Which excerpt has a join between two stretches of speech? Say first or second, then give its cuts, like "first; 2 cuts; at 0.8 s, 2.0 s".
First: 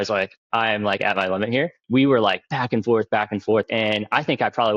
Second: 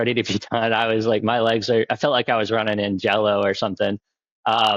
first; 2 cuts; at 1.8 s, 3.7 s